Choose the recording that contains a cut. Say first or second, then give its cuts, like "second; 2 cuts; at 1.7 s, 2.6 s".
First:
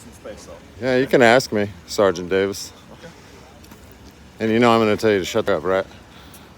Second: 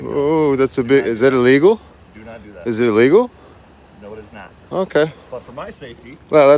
first; 1 cut; at 5.5 s